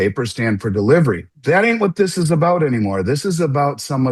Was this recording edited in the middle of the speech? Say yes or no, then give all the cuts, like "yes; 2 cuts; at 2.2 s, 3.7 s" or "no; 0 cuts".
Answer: yes; 1 cut; at 1.3 s